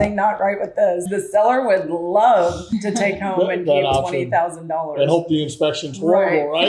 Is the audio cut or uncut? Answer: cut